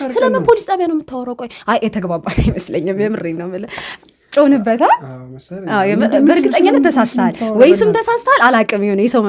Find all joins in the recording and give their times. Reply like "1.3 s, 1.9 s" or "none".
none